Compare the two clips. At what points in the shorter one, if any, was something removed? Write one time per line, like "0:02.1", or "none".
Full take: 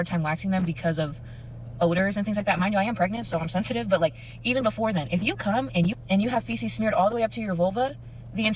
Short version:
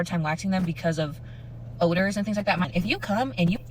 0:02.7